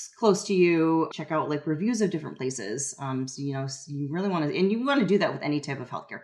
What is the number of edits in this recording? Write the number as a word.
one